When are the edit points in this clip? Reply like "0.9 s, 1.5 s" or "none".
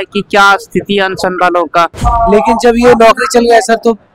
2.0 s